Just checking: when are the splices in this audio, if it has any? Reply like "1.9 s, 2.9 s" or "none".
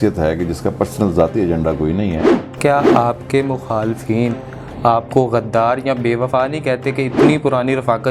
2.6 s